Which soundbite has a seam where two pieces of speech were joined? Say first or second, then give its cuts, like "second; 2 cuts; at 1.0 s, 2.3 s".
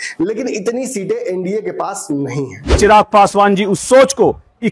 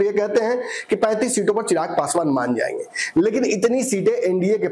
first; 1 cut; at 2.7 s